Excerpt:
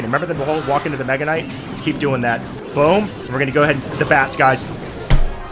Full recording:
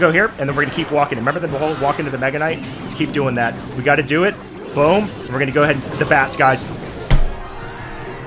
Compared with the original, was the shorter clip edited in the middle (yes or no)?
yes